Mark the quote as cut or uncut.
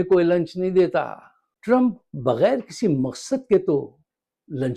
uncut